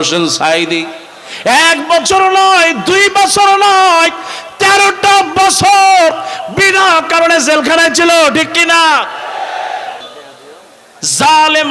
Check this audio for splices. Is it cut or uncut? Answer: cut